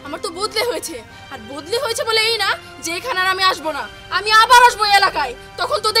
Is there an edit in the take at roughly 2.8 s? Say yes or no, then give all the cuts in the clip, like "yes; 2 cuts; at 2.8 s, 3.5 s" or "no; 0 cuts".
no; 0 cuts